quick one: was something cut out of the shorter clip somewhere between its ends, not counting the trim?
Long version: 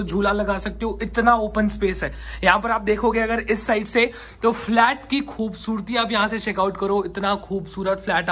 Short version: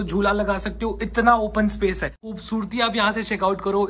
yes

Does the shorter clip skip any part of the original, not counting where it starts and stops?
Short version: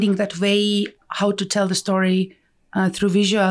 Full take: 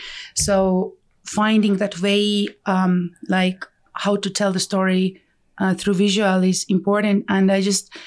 yes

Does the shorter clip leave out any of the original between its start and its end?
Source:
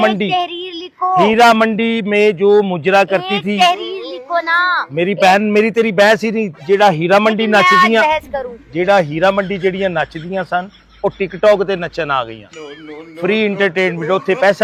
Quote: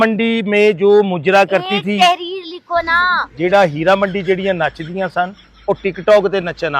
yes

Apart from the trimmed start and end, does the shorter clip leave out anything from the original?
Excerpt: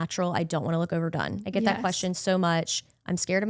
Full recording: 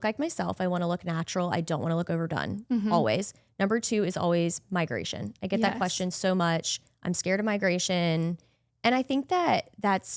yes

